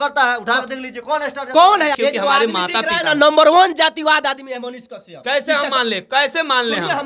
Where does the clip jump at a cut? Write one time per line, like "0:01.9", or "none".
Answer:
0:02.0